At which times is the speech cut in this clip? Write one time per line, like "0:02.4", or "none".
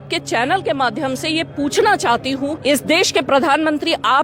0:02.6